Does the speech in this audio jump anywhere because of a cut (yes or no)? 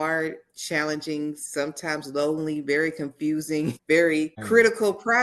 yes